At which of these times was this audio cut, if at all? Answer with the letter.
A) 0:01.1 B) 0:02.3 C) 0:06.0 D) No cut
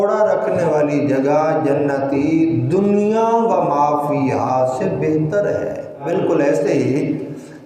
C